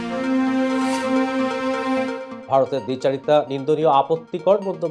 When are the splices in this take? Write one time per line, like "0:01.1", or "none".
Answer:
none